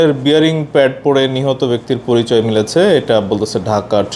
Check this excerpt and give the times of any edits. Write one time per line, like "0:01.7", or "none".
none